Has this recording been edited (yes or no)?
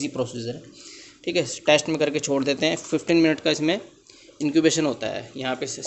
no